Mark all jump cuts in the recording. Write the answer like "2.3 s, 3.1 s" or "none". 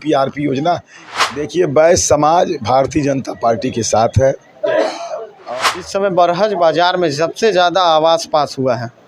1.0 s, 5.3 s